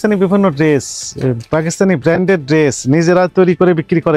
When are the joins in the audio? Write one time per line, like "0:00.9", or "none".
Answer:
none

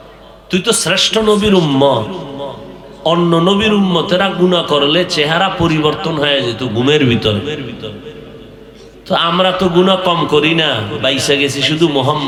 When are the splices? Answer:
none

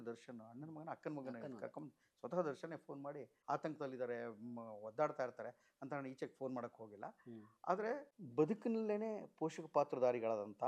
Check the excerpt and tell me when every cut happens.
0:03.3
0:08.2

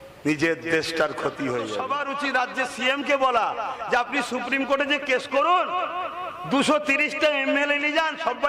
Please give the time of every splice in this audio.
0:01.8

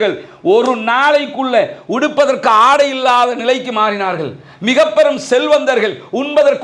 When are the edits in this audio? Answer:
none

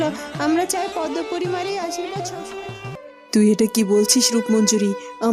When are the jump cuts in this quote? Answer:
0:02.9

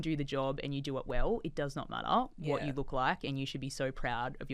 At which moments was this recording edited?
none

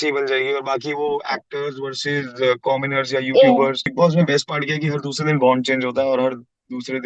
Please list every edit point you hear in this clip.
0:03.9

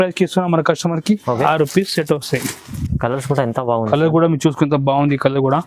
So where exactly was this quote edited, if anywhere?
0:01.4
0:02.8

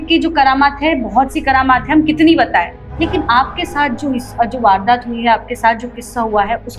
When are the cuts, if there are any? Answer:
none

